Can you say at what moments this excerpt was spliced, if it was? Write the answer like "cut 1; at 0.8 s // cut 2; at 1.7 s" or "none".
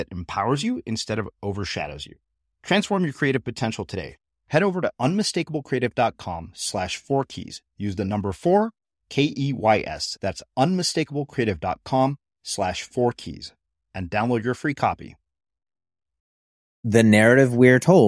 cut 1; at 16.8 s